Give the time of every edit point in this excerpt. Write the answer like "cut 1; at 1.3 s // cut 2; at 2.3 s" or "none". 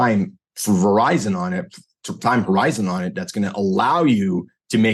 none